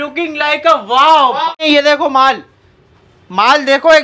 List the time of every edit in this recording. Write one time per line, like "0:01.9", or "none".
0:01.5